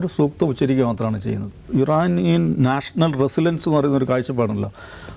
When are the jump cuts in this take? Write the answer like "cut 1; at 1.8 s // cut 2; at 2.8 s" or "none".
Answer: cut 1; at 1.5 s